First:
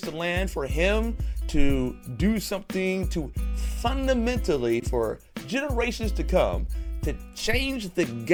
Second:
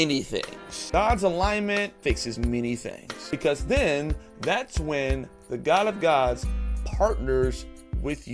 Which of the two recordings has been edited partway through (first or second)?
second